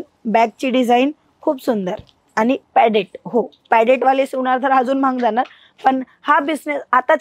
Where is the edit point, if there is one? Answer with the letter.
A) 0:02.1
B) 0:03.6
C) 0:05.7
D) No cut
D